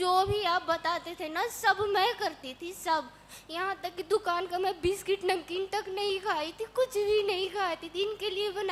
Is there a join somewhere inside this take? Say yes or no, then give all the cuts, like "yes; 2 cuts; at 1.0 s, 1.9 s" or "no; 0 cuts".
no; 0 cuts